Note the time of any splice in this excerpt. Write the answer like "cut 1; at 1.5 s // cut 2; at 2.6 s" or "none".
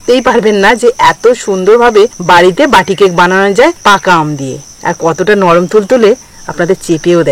cut 1; at 2.2 s // cut 2; at 3.8 s // cut 3; at 4.6 s